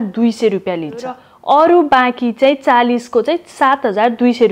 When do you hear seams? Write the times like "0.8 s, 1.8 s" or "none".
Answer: 1.3 s